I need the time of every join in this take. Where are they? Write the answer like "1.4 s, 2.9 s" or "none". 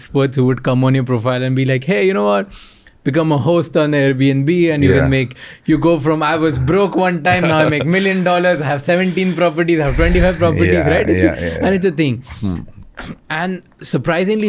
none